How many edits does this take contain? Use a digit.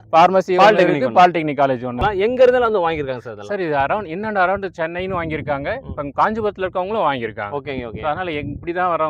1